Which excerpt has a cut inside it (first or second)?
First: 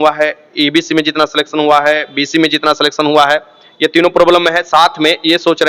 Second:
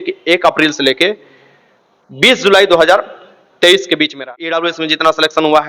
second